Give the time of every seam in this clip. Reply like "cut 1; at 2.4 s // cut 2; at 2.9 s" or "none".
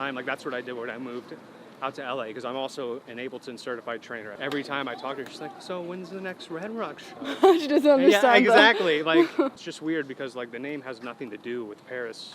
cut 1; at 4.3 s // cut 2; at 9.7 s